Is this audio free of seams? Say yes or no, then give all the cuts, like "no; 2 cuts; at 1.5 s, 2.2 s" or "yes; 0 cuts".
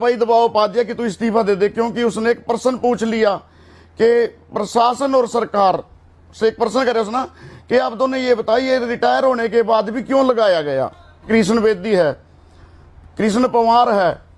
no; 1 cut; at 11.3 s